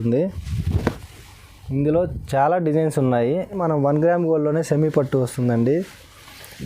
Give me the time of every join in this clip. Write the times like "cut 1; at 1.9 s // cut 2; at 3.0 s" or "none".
cut 1; at 3.6 s